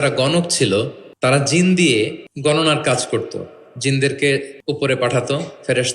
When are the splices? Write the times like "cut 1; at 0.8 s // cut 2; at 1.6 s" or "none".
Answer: cut 1; at 1.0 s // cut 2; at 2.2 s // cut 3; at 4.5 s